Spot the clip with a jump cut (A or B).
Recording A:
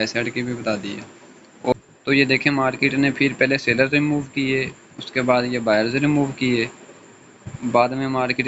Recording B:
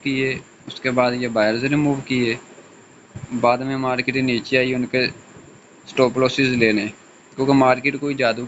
A